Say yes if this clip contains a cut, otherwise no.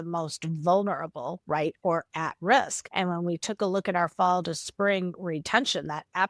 yes